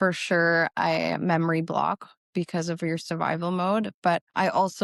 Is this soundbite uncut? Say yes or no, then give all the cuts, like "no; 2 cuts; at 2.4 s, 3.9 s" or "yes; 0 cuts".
yes; 0 cuts